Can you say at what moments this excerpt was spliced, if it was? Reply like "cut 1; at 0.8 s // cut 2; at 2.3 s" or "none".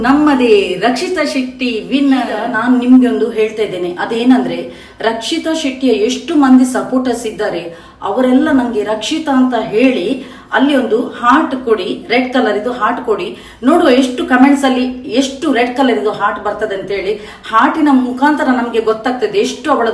cut 1; at 2.2 s